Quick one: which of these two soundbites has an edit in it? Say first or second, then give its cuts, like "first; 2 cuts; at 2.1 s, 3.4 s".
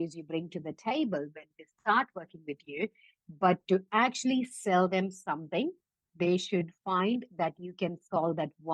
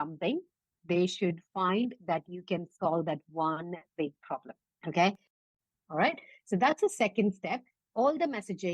second; 1 cut; at 5.3 s